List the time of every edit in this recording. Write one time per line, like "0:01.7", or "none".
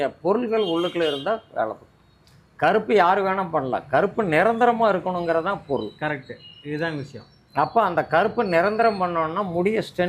none

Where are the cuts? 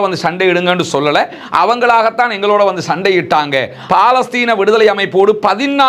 0:03.8

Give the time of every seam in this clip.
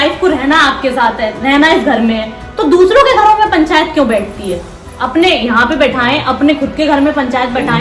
none

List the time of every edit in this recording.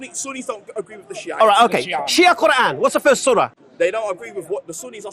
0:03.6

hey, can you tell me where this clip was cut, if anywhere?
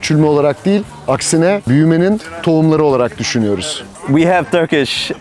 0:03.9

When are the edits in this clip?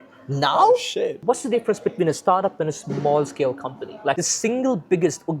0:01.2
0:04.2

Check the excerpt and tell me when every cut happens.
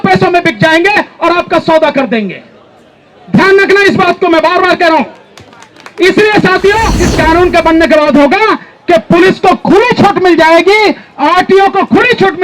0:07.0

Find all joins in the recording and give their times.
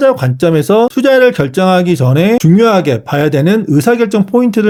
none

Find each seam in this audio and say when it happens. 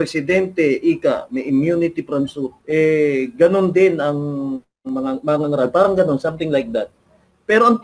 0:02.6

